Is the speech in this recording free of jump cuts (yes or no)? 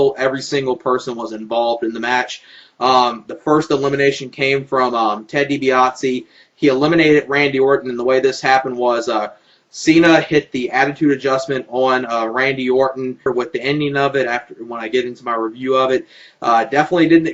yes